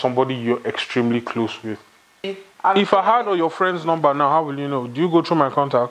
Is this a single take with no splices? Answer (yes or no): no